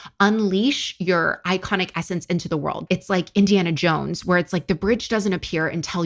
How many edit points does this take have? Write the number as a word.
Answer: one